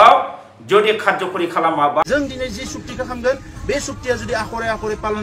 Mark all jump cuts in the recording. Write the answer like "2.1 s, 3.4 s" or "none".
2.0 s